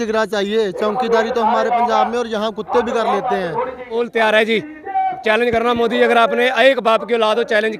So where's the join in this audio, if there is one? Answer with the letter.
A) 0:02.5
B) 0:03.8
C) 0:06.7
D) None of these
B